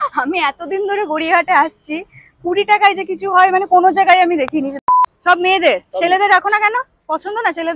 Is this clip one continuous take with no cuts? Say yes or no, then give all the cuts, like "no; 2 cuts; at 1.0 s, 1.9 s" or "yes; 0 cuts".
no; 1 cut; at 4.7 s